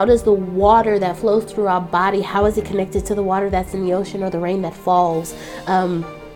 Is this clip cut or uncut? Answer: uncut